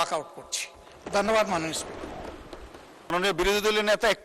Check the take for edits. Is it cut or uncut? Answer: cut